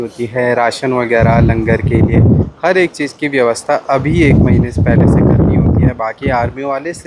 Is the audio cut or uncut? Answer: uncut